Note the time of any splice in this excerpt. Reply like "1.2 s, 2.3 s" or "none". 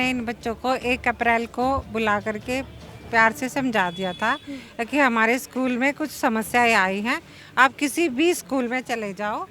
none

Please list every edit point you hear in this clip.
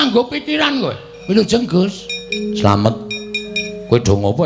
1.1 s

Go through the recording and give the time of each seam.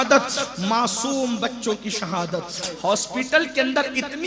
2.6 s

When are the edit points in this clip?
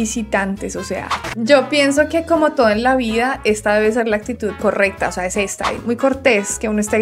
1.2 s, 5.8 s

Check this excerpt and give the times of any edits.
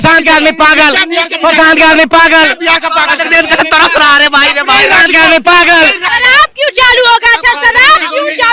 6.0 s

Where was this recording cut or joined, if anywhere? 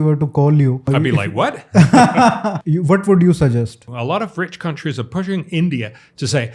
0.9 s, 2.6 s, 3.9 s

